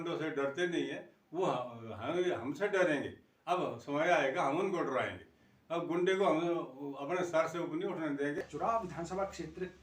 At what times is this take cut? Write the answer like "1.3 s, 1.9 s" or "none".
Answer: 8.4 s